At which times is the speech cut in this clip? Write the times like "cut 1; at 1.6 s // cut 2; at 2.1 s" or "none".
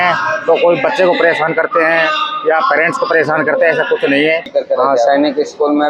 cut 1; at 4.5 s